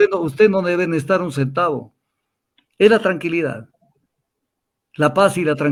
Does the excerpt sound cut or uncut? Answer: uncut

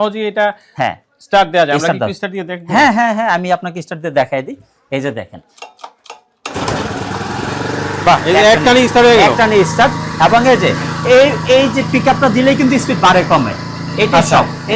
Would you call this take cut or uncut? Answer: uncut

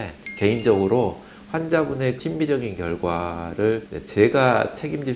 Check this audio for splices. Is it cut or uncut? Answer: cut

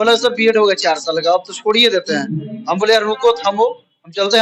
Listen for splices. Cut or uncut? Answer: uncut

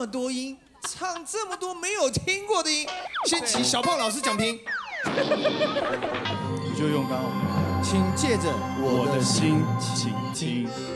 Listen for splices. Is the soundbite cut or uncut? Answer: cut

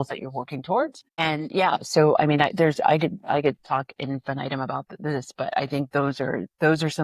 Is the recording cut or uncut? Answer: cut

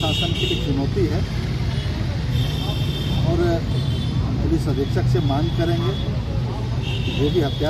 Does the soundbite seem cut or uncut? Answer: uncut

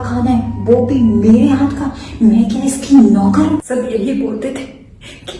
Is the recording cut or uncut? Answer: cut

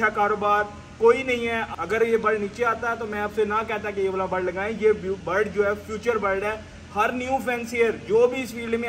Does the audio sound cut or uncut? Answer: cut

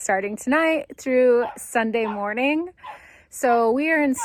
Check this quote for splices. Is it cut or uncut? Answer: uncut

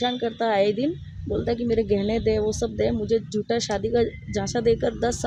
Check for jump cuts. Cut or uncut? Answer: uncut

